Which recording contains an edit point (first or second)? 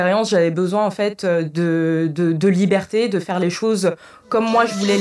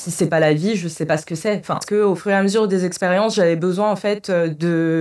second